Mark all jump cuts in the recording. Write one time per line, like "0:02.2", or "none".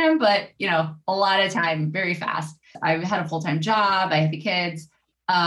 0:02.7

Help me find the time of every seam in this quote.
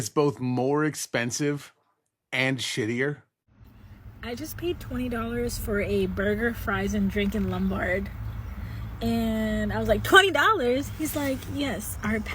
0:03.8

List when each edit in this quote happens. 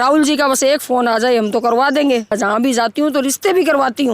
0:02.3

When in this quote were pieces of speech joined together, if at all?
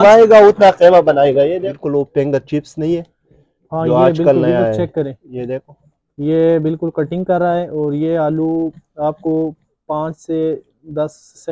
0:01.7

